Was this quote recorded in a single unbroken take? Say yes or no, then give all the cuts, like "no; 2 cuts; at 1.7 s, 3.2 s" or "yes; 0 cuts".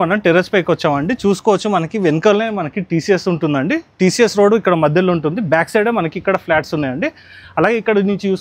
yes; 0 cuts